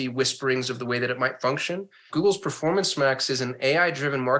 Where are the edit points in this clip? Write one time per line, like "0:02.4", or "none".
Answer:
0:02.1